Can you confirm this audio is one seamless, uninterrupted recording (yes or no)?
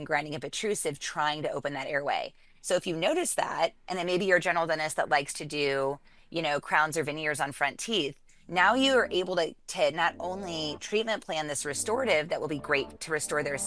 yes